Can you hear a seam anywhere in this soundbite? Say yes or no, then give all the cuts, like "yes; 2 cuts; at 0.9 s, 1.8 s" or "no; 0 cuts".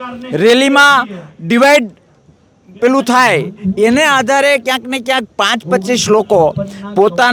no; 0 cuts